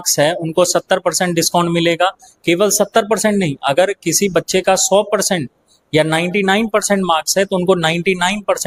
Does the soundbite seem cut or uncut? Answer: uncut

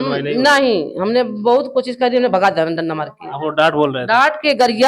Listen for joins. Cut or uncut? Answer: uncut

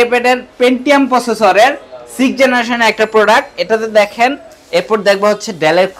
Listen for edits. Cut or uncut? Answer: cut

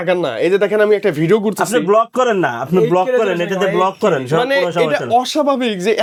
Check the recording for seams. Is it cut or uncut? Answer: uncut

